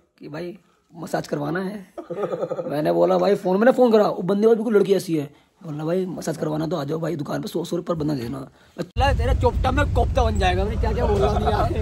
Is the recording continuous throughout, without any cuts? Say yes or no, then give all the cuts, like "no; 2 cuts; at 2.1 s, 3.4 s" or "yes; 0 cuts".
no; 1 cut; at 8.9 s